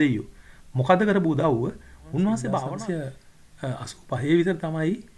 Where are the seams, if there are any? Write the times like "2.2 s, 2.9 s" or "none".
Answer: 2.7 s